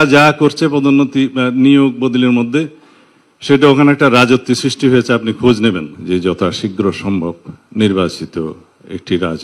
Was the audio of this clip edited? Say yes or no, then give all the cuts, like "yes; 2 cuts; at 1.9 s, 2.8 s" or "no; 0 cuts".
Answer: yes; 1 cut; at 5.9 s